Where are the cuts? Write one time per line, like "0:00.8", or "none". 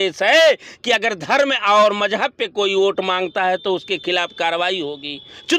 none